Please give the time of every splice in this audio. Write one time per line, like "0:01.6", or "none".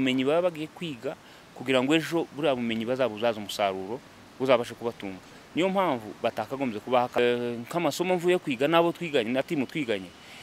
0:07.2